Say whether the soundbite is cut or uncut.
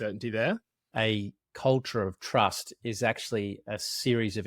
cut